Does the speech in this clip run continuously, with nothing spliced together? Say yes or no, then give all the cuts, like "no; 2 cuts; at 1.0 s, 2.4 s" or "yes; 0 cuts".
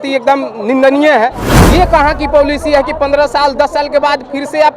no; 1 cut; at 1.5 s